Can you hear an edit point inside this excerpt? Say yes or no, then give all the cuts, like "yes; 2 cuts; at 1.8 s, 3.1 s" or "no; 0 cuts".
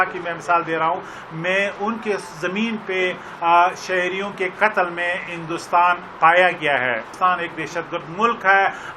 yes; 1 cut; at 7.1 s